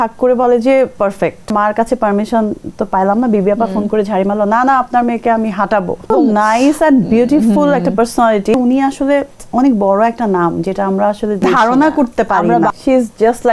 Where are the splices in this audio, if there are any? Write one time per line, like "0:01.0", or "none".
0:01.5
0:06.1
0:08.5
0:11.4
0:12.8